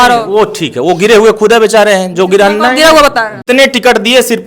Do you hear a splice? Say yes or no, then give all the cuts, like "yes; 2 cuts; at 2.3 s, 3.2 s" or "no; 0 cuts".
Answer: yes; 1 cut; at 3.4 s